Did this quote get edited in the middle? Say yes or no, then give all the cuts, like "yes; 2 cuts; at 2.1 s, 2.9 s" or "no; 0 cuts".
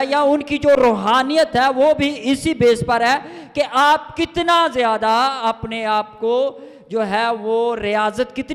no; 0 cuts